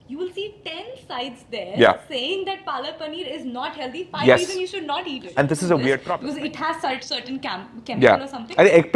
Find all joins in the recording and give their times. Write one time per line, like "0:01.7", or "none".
0:06.2